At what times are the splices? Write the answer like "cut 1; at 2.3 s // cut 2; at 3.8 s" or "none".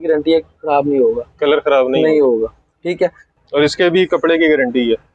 cut 1; at 3.3 s

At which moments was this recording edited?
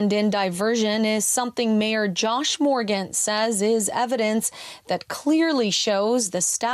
none

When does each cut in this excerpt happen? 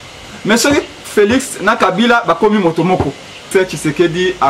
cut 1; at 3.5 s

